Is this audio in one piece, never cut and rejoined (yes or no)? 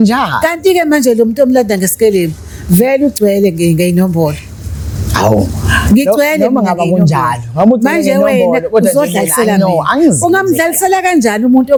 yes